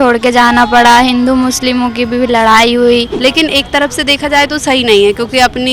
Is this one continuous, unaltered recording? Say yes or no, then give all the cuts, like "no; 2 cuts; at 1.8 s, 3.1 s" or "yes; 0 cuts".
no; 1 cut; at 3.1 s